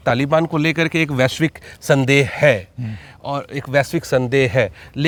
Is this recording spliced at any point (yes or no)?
no